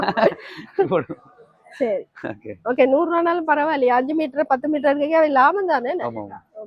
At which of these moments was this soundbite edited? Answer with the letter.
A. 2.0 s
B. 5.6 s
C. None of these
C